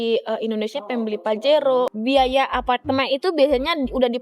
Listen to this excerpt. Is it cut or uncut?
cut